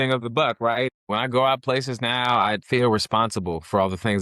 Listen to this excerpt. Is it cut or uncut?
cut